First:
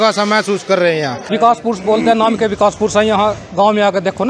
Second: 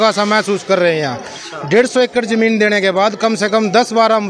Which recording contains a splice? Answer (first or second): first